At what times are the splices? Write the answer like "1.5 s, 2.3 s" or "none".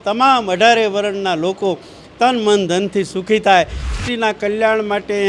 3.9 s